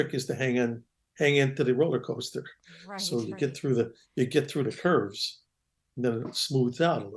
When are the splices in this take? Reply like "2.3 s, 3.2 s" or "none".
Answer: none